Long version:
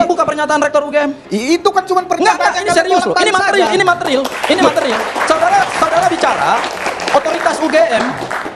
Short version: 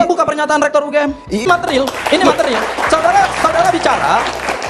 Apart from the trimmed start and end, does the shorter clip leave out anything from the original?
yes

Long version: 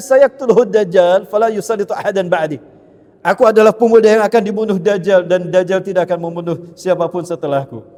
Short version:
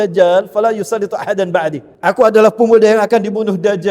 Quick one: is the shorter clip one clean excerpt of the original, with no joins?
no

